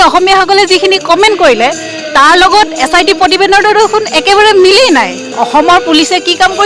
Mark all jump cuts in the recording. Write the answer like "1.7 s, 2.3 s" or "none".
5.3 s

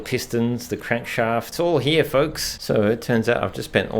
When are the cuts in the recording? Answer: 1.5 s, 2.6 s

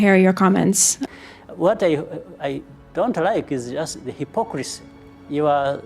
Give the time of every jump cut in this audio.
0.9 s

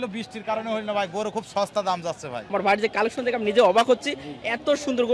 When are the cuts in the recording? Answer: 2.4 s

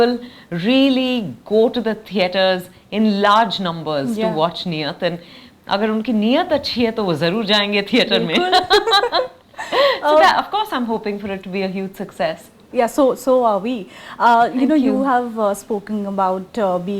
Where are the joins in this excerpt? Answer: none

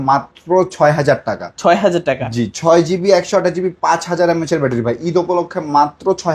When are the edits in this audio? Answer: none

